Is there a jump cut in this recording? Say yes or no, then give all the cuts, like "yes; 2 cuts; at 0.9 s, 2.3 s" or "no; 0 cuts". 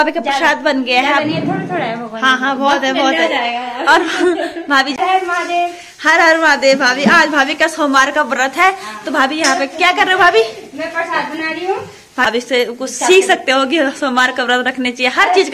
yes; 2 cuts; at 5.0 s, 12.2 s